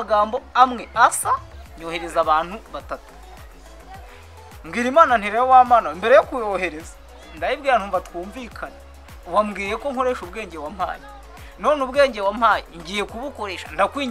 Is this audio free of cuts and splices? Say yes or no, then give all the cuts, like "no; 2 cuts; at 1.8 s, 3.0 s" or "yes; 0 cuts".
yes; 0 cuts